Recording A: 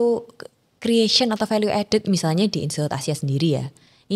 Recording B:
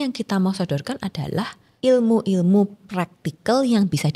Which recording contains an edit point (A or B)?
B